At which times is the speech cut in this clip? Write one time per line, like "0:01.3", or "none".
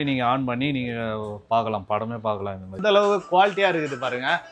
0:02.7